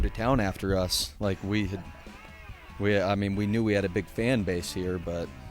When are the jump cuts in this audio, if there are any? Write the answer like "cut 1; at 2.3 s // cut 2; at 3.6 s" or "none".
none